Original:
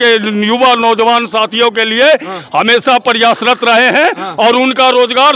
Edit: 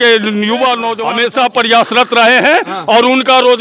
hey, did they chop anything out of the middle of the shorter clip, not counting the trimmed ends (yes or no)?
yes